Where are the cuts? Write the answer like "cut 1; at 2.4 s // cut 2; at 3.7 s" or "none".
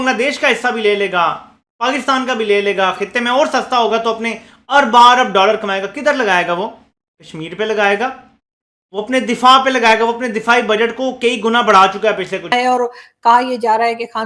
cut 1; at 12.5 s